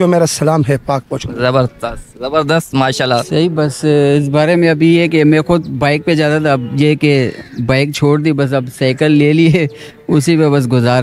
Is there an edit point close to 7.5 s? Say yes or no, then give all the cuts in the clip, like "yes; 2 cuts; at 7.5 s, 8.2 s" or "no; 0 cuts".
no; 1 cut; at 3.3 s